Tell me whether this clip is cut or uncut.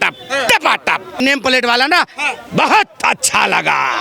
cut